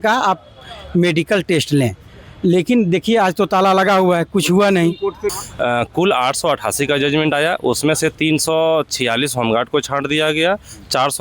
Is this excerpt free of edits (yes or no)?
no